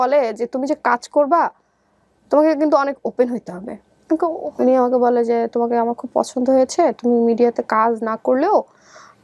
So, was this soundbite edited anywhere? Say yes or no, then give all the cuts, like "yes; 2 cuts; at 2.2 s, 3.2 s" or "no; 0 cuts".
yes; 1 cut; at 4.0 s